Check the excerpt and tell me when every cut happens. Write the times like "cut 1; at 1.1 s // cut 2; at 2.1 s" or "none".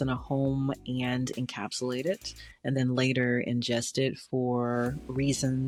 none